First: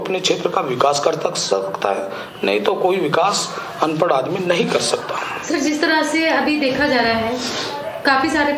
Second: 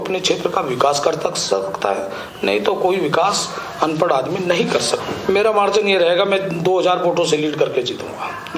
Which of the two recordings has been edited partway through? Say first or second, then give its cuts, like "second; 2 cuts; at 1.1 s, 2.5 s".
second; 1 cut; at 5.1 s